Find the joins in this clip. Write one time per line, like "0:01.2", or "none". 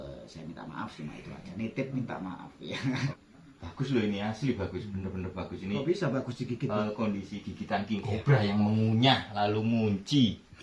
0:03.1
0:06.8